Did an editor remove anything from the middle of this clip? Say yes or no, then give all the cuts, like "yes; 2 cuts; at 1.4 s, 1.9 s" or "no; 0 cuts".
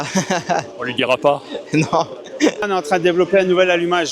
yes; 1 cut; at 2.7 s